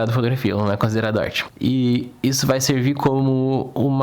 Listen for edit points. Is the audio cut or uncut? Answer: cut